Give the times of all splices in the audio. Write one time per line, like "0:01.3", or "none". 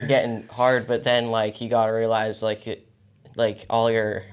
none